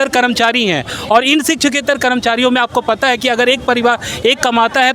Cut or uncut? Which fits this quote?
uncut